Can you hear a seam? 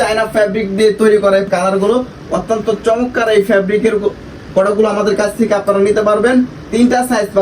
yes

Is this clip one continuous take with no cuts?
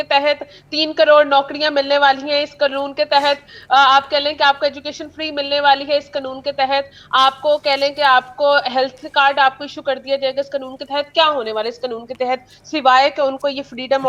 yes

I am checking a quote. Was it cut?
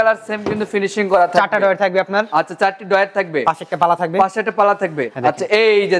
no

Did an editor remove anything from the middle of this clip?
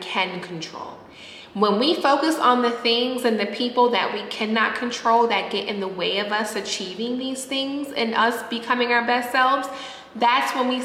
no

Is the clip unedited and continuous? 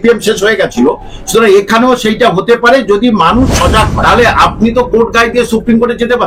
no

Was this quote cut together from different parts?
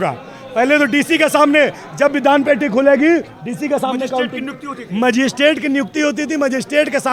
no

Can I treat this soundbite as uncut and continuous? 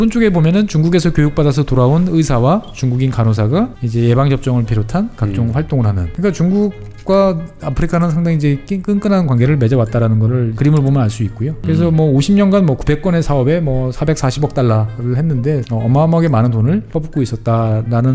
no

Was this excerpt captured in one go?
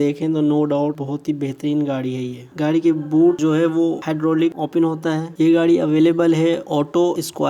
no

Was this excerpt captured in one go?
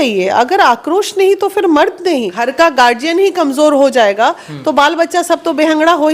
no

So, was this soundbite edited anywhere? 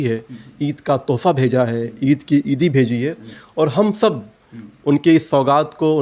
no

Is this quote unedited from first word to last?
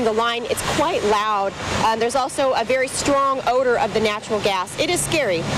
yes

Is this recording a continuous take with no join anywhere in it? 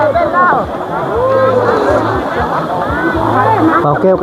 yes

